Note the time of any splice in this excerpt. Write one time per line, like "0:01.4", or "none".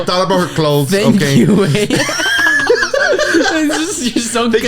none

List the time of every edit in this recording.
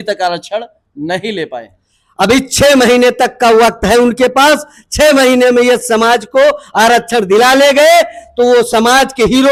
none

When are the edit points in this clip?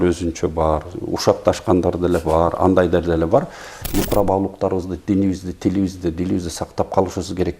0:03.8

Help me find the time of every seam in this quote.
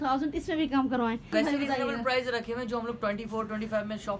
0:01.3

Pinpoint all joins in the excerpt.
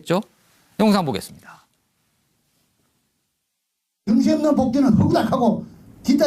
0:05.3

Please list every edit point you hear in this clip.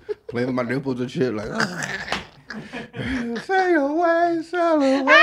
none

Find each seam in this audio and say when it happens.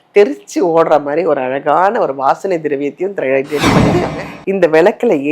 0:03.9

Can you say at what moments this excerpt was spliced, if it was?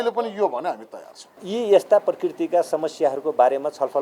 0:01.4

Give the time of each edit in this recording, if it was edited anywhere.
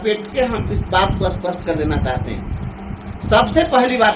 none

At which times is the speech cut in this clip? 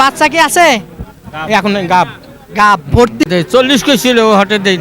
0:03.2

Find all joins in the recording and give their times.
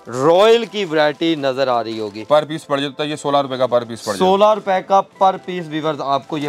0:02.2

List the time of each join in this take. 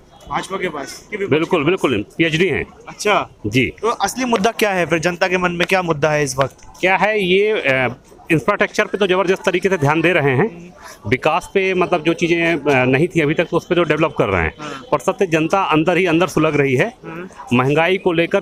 none

